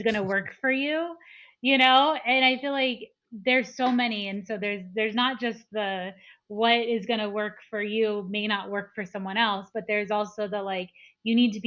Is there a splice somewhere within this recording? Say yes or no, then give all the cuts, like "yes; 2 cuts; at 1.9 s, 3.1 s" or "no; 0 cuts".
no; 0 cuts